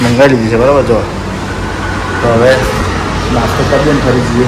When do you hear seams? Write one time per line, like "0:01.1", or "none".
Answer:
none